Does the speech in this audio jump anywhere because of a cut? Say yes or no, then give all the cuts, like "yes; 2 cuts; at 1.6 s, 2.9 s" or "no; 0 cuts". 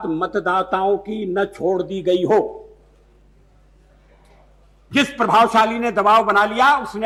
no; 0 cuts